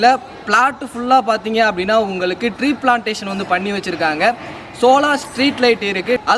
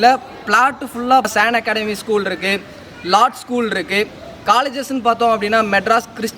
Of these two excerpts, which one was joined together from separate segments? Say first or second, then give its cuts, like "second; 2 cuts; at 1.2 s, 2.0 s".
second; 1 cut; at 1.2 s